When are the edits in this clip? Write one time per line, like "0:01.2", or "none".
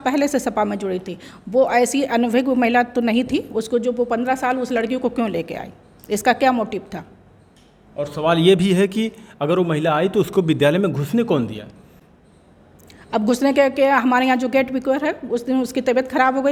none